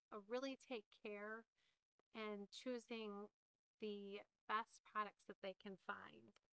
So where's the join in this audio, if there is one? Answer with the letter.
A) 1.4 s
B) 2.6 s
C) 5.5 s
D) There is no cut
D